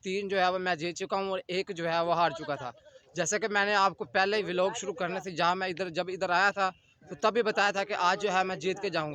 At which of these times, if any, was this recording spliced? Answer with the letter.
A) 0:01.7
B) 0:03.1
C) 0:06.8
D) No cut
D